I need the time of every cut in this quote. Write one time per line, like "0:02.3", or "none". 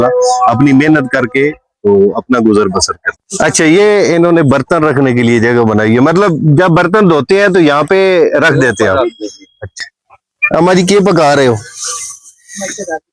0:03.2
0:09.7